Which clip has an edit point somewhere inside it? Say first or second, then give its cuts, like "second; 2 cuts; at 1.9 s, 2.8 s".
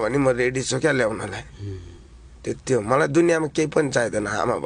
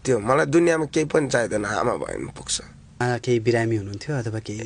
second; 1 cut; at 3.0 s